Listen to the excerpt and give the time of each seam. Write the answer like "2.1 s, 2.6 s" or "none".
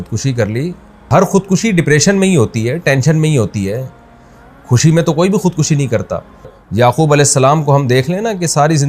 1.1 s, 6.6 s